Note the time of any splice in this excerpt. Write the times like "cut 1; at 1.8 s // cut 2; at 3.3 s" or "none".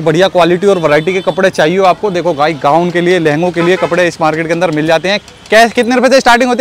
none

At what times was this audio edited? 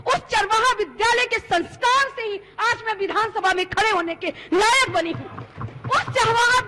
none

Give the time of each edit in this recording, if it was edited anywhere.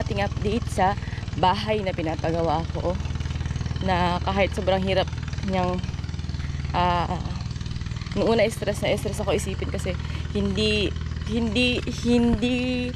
none

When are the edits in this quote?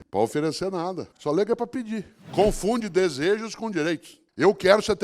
cut 1; at 1.1 s // cut 2; at 2.2 s

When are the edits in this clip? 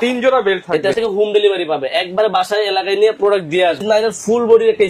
cut 1; at 1.0 s // cut 2; at 3.8 s

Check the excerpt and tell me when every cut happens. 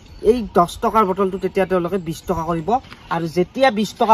none

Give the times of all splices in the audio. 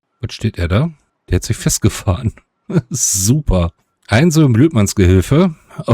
cut 1; at 1.1 s

